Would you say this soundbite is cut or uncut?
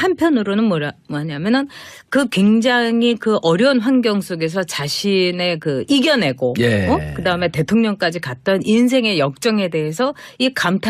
cut